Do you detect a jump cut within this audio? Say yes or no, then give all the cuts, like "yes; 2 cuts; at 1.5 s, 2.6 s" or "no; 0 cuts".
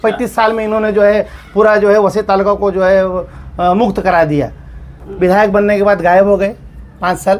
no; 0 cuts